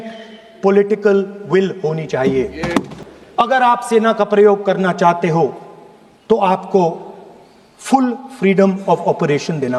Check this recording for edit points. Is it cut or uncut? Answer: cut